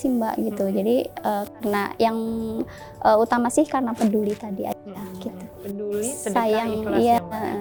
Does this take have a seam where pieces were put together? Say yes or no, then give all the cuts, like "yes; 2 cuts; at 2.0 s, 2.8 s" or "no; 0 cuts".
no; 0 cuts